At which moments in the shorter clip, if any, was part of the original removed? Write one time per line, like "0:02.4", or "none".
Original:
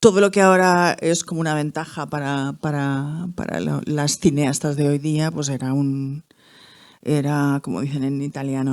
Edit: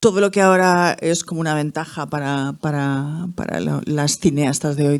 none